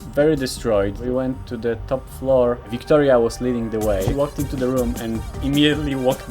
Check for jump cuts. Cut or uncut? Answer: cut